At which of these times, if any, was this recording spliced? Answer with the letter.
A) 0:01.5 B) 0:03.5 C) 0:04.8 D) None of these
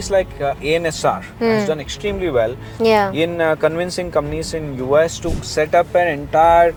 D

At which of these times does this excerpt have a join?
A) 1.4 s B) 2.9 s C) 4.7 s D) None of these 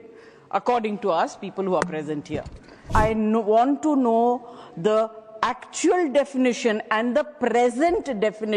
B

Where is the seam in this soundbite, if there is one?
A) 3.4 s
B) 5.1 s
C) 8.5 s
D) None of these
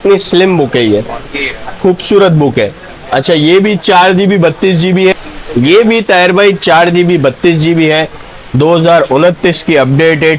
B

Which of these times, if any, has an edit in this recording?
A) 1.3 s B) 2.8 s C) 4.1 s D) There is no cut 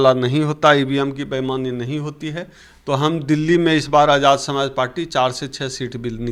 D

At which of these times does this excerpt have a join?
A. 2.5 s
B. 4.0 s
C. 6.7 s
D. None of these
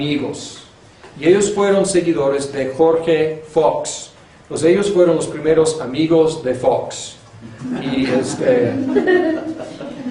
A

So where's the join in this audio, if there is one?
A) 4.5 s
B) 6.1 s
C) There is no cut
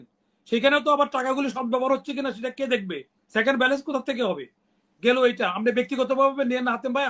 C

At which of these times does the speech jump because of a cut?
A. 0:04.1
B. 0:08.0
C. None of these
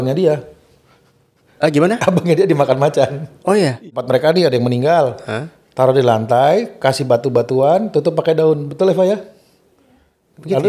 A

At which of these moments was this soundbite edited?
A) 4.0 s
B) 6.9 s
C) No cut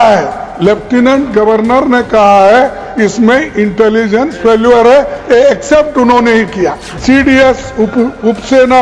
B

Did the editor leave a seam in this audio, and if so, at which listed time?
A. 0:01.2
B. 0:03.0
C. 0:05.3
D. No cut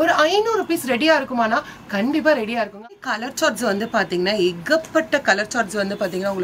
B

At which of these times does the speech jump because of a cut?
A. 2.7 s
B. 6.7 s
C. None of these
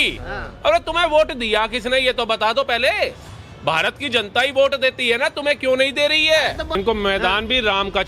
B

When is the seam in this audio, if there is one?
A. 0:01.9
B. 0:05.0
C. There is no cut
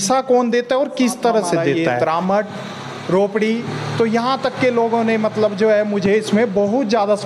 A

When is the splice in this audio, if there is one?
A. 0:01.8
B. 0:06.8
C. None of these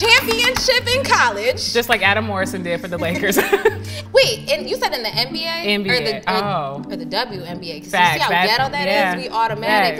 C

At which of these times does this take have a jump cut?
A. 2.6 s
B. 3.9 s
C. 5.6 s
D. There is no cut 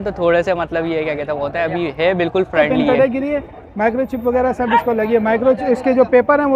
A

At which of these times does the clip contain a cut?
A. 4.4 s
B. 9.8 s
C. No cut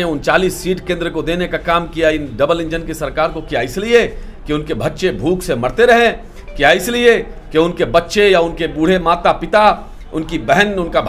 C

